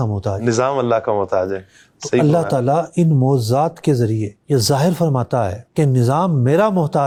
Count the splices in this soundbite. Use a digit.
0